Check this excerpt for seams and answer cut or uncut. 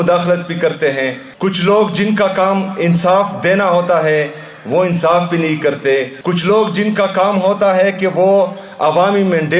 cut